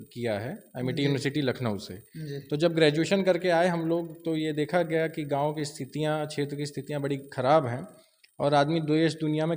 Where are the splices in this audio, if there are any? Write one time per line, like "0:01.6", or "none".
none

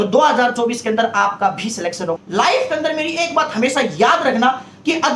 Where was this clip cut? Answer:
0:02.2

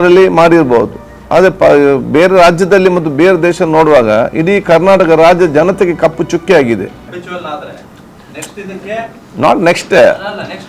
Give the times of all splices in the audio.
0:07.1

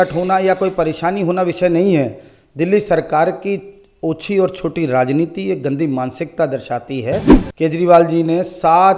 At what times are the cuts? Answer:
0:07.5

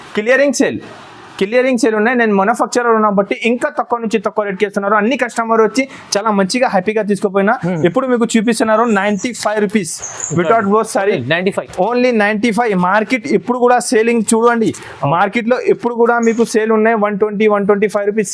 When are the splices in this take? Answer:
none

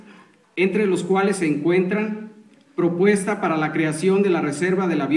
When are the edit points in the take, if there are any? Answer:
0:01.8

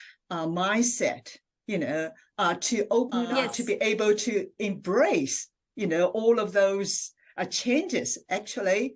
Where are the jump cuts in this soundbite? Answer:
0:03.3

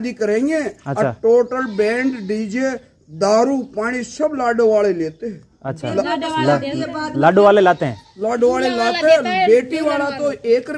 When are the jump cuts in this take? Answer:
none

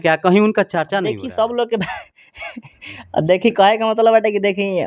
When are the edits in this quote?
0:01.1

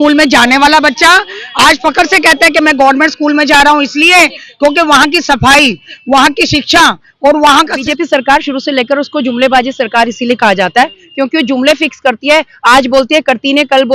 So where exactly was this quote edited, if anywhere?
0:02.6
0:07.8

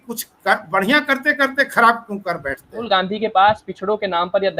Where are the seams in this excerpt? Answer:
0:02.8

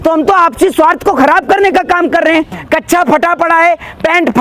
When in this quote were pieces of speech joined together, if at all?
0:02.6

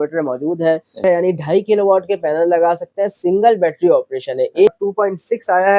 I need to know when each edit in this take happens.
0:01.0
0:04.7

